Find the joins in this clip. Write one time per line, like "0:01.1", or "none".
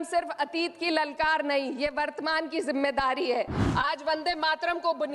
0:03.6